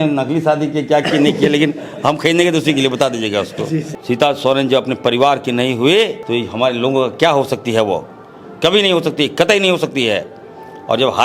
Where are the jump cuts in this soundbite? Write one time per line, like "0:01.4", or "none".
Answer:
0:03.9
0:06.2